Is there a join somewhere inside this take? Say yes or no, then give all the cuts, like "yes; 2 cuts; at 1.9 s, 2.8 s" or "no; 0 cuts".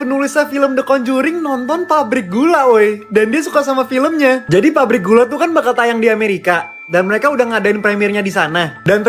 no; 0 cuts